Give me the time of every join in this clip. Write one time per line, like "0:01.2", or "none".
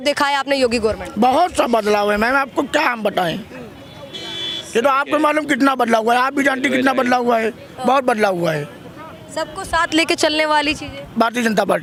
none